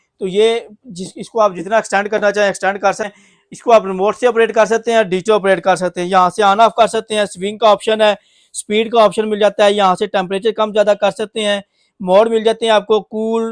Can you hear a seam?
yes; 1 cut; at 3.2 s

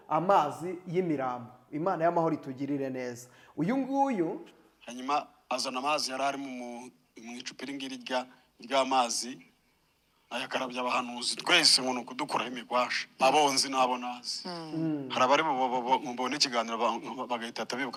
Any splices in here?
no; 0 cuts

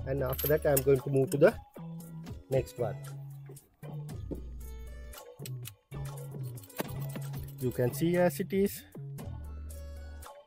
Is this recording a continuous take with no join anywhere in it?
no; 1 cut; at 7.4 s

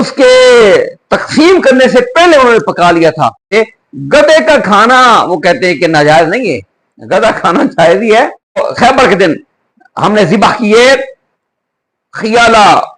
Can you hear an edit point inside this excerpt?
yes; 2 cuts; at 3.5 s, 8.7 s

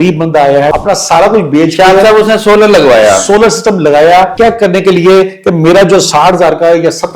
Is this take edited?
yes; 2 cuts; at 0.8 s, 4.3 s

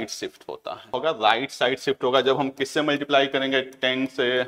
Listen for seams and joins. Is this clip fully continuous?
no; 1 cut; at 1.0 s

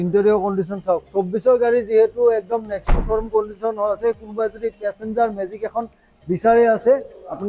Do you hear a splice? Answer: no; 0 cuts

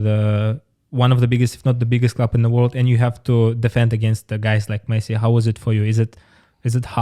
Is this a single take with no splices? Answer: yes; 0 cuts

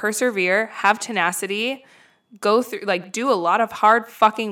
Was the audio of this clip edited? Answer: no; 0 cuts

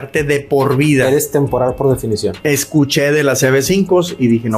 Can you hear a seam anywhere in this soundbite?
yes; 1 cut; at 2.4 s

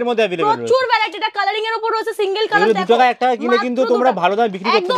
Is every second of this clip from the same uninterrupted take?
yes; 0 cuts

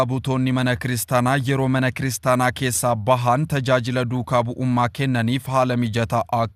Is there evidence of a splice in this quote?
no; 0 cuts

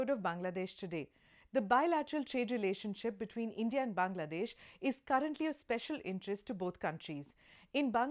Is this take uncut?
no; 1 cut; at 3.3 s

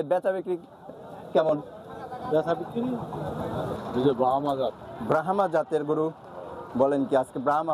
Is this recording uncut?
no; 1 cut; at 3.7 s

